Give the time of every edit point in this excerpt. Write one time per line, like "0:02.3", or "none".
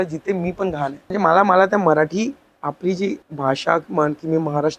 0:01.1
0:03.3